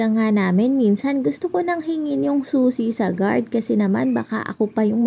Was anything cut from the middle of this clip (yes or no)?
no